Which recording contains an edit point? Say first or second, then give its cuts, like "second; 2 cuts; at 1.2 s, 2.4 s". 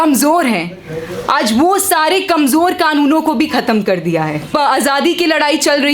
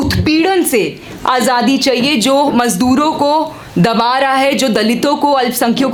first; 1 cut; at 4.5 s